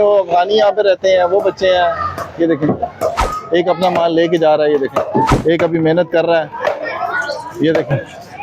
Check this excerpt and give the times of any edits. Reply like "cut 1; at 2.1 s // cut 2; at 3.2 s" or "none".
cut 1; at 3.3 s // cut 2; at 5.3 s